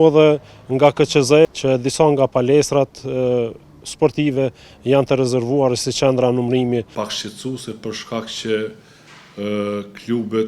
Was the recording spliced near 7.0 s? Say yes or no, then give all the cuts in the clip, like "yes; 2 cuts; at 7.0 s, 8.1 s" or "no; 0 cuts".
yes; 2 cuts; at 1.4 s, 7.0 s